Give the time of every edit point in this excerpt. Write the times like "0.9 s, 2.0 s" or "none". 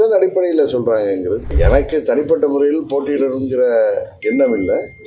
1.5 s